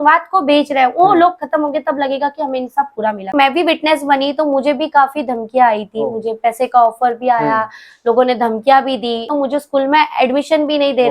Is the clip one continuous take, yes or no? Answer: no